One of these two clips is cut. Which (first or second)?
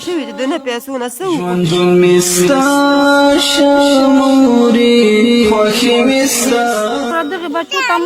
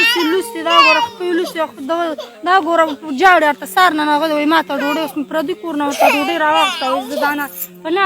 first